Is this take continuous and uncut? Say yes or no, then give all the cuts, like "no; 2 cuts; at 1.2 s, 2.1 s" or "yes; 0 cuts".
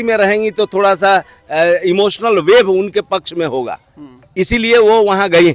yes; 0 cuts